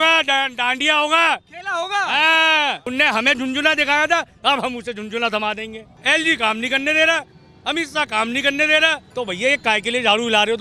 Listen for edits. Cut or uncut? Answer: cut